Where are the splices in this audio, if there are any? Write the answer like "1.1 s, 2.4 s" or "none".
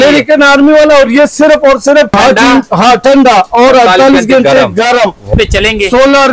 2.1 s, 5.3 s